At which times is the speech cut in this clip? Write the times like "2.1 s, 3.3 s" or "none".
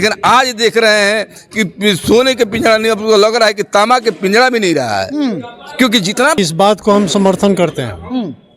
6.4 s

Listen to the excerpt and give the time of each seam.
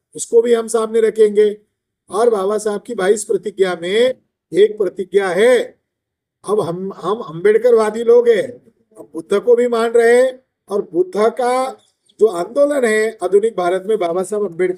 none

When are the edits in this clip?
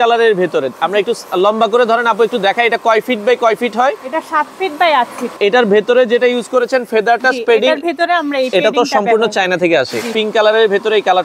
5.3 s, 10.1 s

